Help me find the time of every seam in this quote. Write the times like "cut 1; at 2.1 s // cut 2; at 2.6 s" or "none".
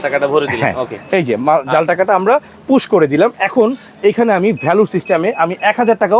none